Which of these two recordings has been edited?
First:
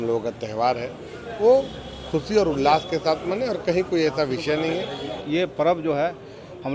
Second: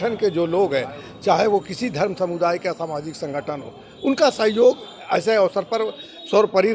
first; 1 cut; at 5.2 s

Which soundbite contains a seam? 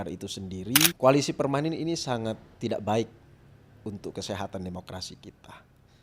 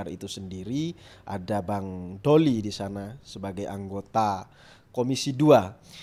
first; 1 cut; at 0.9 s

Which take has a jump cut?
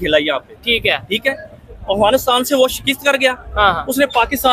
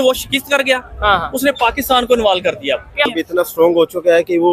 second; 1 cut; at 3.1 s

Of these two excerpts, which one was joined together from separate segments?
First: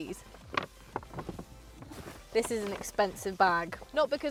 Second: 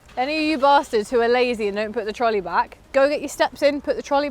second; 1 cut; at 2.8 s

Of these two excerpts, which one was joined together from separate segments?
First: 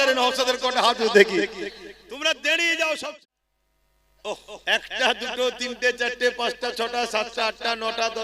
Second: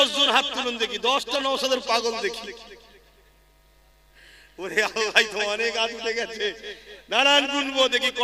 first; 1 cut; at 3.0 s

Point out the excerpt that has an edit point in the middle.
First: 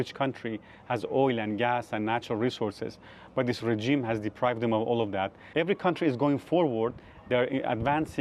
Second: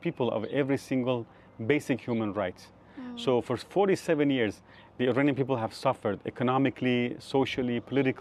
first; 1 cut; at 5.4 s

